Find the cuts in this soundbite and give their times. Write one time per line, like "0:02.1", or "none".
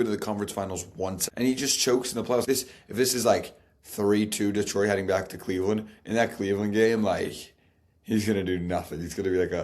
0:01.2
0:02.4